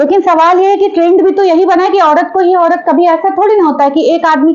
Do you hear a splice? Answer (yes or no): no